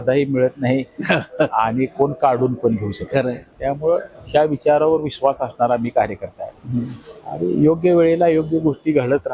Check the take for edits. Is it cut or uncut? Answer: uncut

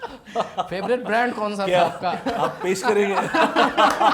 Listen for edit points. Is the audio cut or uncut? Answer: uncut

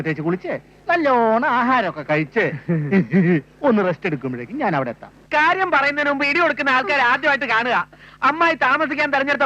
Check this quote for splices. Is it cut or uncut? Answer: cut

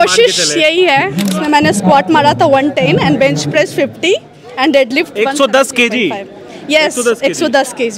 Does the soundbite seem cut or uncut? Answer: cut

